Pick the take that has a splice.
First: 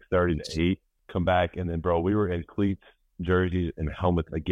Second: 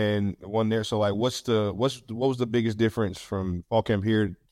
first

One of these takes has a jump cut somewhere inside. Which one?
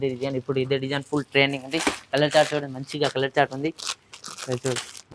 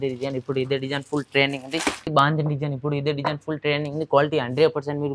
second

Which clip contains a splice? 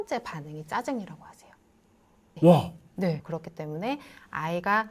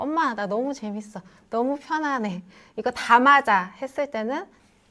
first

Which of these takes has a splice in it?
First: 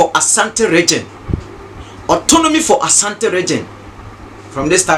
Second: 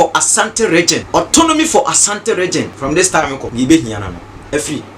second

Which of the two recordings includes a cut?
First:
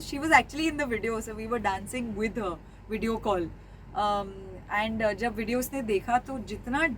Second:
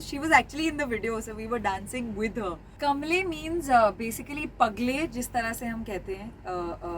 second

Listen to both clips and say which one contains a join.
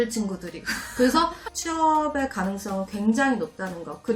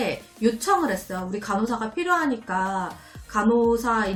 first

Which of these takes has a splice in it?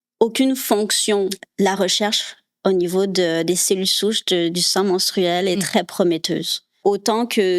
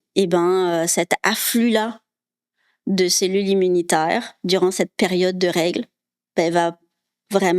first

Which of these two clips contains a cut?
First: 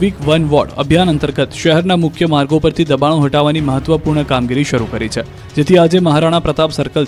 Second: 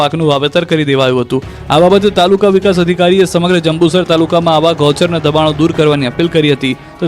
second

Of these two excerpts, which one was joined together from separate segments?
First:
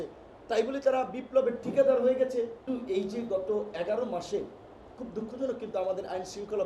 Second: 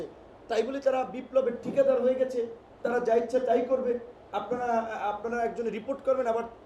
first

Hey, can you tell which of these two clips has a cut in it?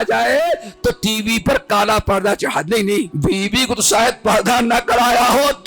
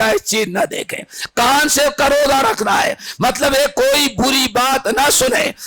first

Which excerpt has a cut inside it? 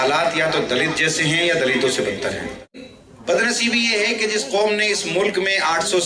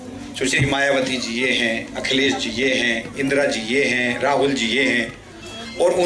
first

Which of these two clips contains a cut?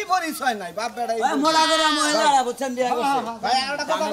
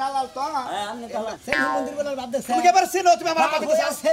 second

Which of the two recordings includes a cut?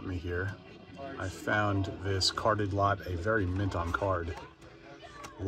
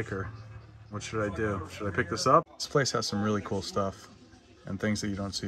second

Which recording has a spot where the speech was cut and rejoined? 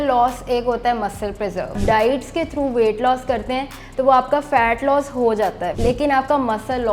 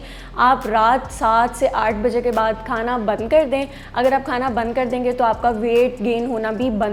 first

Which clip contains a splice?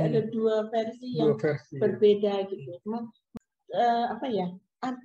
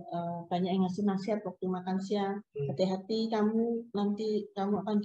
first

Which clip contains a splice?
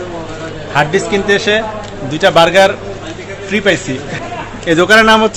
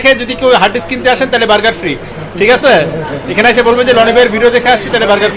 first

